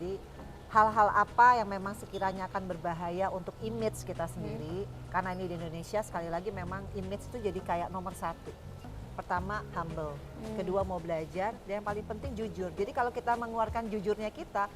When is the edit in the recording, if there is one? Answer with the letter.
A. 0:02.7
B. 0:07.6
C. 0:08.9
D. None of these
C